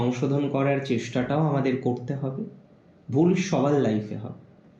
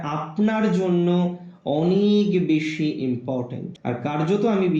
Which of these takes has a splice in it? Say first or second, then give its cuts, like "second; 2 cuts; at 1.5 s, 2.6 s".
second; 1 cut; at 3.7 s